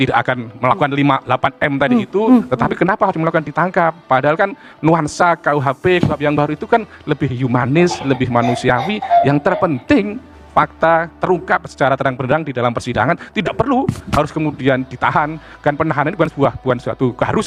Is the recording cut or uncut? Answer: uncut